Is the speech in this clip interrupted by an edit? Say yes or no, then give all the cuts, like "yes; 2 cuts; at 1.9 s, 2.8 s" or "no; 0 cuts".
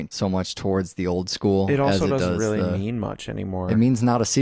yes; 1 cut; at 2.9 s